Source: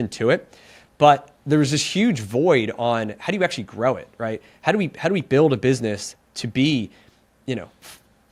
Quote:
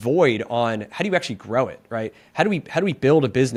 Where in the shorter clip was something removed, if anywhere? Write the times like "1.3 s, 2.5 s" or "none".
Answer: none